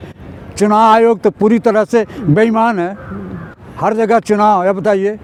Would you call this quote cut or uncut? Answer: uncut